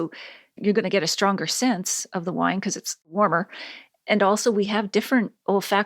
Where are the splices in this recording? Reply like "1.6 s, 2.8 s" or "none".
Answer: 3.1 s